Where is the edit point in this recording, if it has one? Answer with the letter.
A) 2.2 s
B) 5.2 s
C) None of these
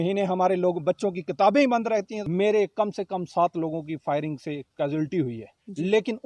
A